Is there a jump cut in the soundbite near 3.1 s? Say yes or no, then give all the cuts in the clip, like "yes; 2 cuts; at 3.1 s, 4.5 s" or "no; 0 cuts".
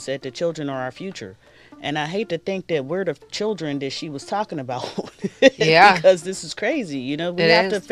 no; 0 cuts